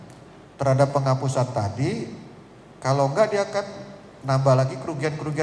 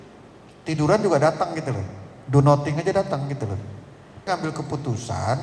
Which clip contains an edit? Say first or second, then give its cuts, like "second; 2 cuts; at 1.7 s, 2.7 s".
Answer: second; 1 cut; at 4.2 s